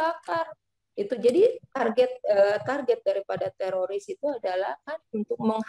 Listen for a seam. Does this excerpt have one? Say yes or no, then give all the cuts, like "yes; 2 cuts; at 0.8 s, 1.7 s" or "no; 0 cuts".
no; 0 cuts